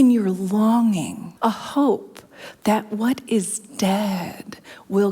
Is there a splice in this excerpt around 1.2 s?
yes; 1 cut; at 1.2 s

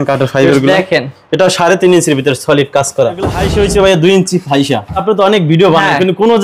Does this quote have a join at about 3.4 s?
yes; 2 cuts; at 3.4 s, 5.0 s

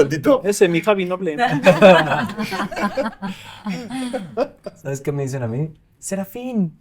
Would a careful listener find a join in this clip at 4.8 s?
yes; 1 cut; at 4.8 s

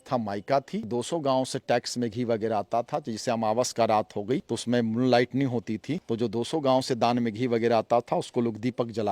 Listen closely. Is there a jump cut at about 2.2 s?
no; 3 cuts; at 0.8 s, 4.5 s, 6.0 s

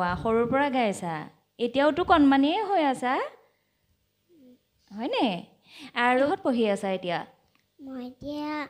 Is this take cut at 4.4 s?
no; 1 cut; at 6.3 s

